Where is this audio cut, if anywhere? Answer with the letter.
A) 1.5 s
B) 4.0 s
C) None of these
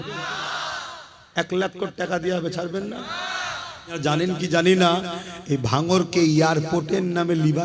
B